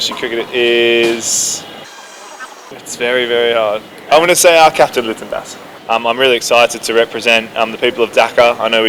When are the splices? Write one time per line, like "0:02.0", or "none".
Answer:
0:02.4
0:05.7

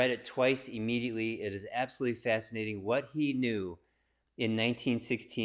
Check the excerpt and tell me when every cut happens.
none

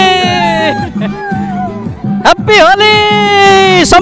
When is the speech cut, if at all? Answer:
none

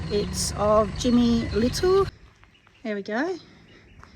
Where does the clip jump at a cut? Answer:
0:02.1

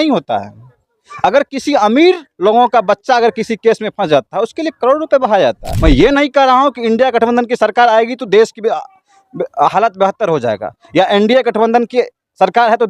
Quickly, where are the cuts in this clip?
0:05.7

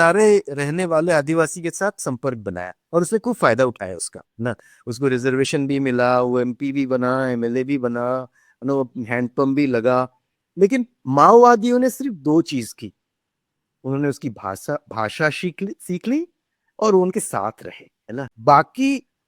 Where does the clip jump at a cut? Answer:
0:18.3

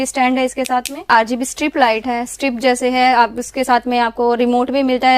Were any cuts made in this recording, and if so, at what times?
0:01.1

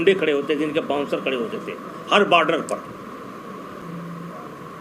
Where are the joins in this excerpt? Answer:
0:03.8

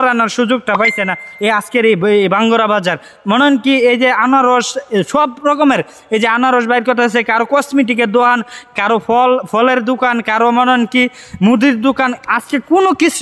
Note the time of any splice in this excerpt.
none

